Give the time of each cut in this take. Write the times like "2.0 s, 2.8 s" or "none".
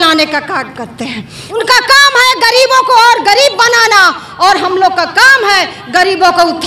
1.4 s